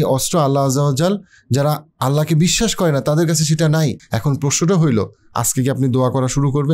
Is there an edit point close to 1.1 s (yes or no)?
no